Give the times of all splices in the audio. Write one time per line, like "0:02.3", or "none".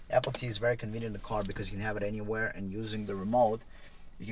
none